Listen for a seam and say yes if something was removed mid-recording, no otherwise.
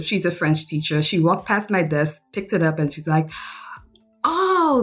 no